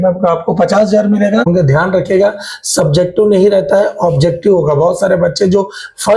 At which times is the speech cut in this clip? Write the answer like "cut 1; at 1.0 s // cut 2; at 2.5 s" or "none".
cut 1; at 1.5 s